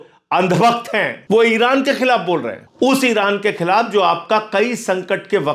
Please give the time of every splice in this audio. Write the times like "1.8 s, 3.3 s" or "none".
1.2 s, 2.6 s